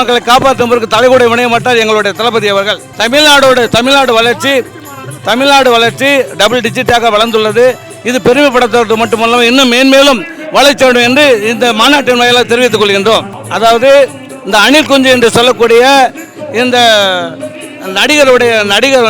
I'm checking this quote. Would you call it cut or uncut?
uncut